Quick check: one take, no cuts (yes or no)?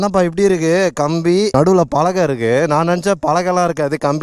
no